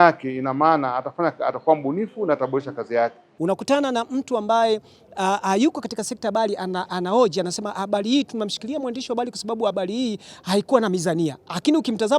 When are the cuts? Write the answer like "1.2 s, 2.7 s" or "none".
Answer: 3.2 s